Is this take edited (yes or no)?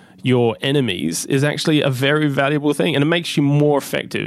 yes